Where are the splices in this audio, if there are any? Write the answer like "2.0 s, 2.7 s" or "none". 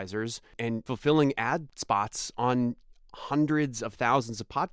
0.8 s, 1.7 s

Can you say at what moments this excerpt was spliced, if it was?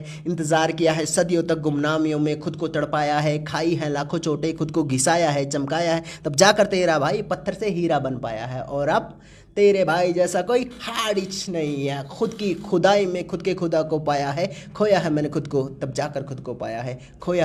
none

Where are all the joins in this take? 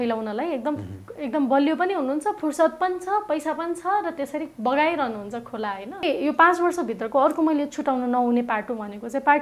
6.0 s

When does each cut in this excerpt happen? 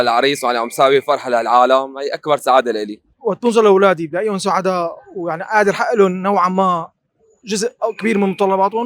3.1 s

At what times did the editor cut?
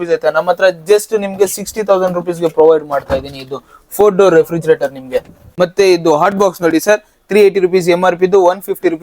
5.4 s

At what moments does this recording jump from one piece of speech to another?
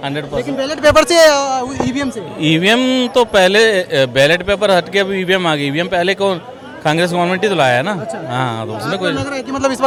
none

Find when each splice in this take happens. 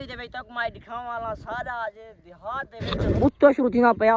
3.2 s

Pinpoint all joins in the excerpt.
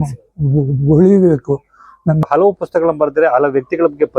2.3 s

